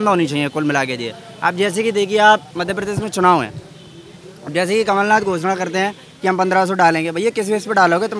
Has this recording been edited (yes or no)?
no